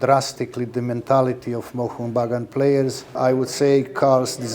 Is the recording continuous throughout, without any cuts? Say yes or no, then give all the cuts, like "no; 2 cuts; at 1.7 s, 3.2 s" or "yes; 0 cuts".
no; 1 cut; at 3.1 s